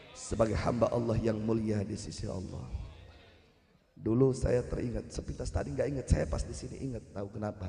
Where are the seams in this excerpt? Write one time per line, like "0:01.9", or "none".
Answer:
none